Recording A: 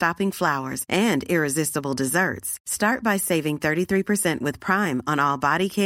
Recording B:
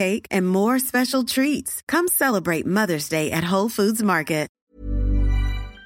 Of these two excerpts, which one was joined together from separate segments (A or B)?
B